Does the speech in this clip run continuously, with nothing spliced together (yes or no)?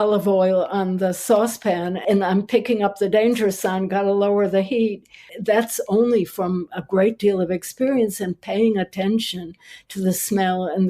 no